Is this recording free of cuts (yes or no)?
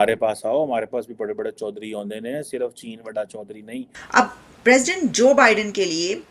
no